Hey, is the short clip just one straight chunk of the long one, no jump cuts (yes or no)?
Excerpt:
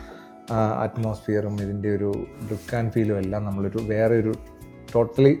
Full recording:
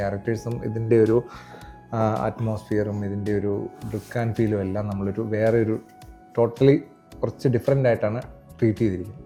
yes